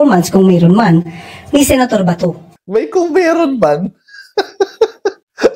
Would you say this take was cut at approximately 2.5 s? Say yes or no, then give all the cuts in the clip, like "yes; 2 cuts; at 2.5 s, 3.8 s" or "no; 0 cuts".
yes; 1 cut; at 2.5 s